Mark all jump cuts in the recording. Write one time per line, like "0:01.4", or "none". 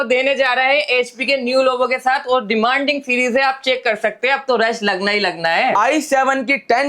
0:05.8